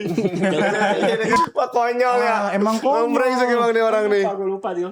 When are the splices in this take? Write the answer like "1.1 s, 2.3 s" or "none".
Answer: 1.4 s